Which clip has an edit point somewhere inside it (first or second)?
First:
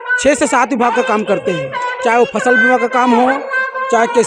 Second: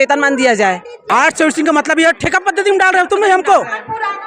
second